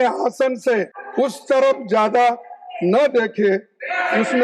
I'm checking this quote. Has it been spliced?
yes; 1 cut; at 1.0 s

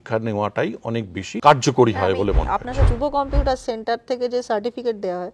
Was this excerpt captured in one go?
no; 2 cuts; at 1.3 s, 2.8 s

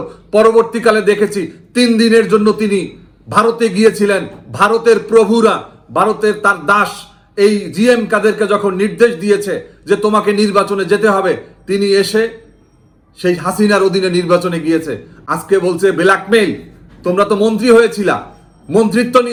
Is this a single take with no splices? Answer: yes; 0 cuts

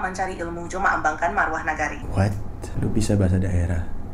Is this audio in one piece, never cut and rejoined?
no; 1 cut; at 2.2 s

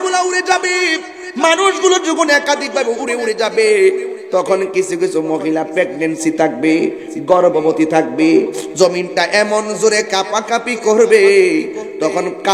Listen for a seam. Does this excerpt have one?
no; 0 cuts

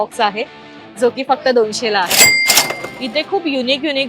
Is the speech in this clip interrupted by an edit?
yes; 1 cut; at 2.5 s

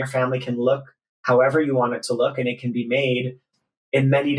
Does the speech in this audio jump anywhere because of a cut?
no; 0 cuts

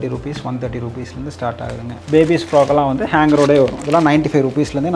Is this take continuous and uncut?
yes; 0 cuts

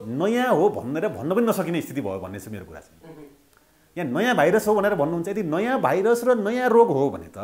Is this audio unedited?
yes; 0 cuts

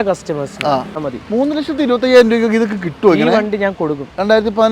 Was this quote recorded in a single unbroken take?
no; 1 cut; at 1.0 s

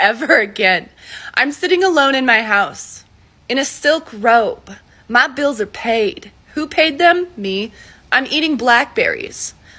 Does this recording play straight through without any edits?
yes; 0 cuts

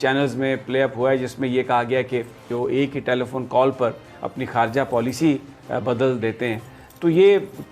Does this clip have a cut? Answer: yes; 1 cut; at 2.5 s

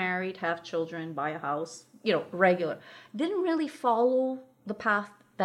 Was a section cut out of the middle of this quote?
no; 0 cuts

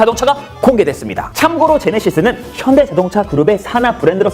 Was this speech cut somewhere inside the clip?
no; 0 cuts

